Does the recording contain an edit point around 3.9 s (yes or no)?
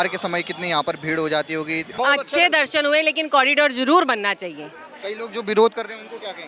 no